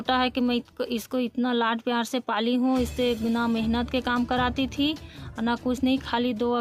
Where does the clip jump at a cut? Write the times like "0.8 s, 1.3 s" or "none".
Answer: none